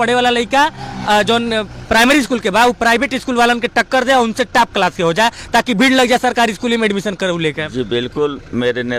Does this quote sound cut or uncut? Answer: uncut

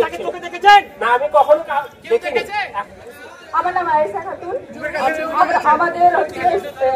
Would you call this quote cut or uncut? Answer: uncut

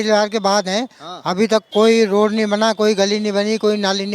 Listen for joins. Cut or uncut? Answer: uncut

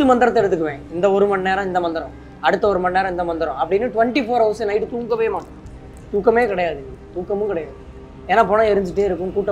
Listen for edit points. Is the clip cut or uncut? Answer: uncut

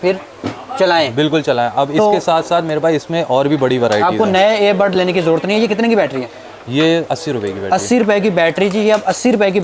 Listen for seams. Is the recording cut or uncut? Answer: uncut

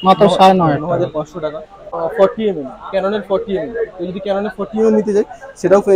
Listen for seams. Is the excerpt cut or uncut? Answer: cut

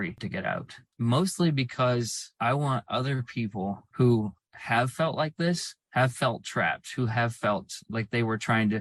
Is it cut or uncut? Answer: uncut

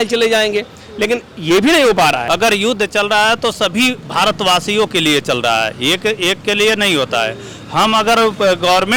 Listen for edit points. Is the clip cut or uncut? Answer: cut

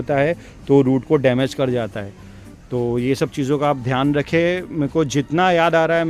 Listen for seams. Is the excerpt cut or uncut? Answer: uncut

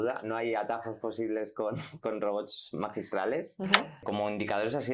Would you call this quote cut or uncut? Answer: cut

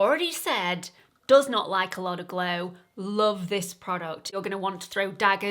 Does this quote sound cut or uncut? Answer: cut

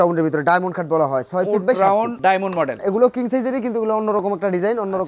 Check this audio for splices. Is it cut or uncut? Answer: cut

